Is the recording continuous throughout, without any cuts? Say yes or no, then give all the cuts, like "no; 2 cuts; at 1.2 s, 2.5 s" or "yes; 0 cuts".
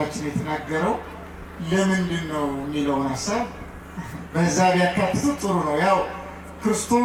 yes; 0 cuts